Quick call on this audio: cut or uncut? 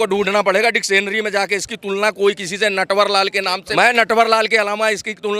cut